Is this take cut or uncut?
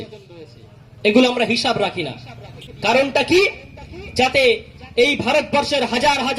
cut